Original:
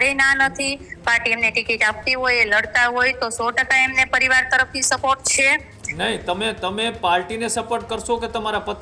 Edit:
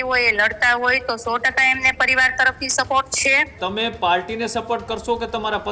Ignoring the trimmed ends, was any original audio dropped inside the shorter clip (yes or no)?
yes